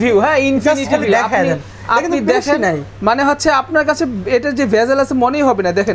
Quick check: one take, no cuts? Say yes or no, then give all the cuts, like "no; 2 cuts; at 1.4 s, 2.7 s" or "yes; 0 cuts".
yes; 0 cuts